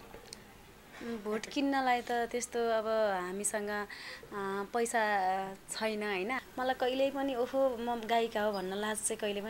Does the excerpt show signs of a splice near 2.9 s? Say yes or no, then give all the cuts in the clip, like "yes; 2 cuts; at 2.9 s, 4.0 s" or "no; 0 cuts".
no; 1 cut; at 6.4 s